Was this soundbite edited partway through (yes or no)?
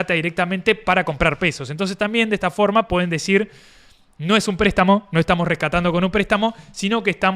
no